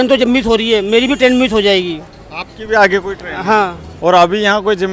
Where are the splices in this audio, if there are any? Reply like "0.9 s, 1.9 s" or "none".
3.8 s